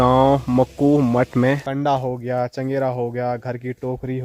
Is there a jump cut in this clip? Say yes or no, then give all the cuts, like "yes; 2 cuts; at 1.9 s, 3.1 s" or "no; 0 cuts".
yes; 1 cut; at 1.6 s